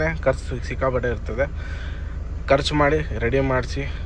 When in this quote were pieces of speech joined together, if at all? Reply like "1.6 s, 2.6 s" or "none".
none